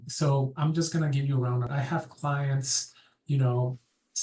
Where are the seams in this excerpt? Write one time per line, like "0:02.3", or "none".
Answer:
0:01.7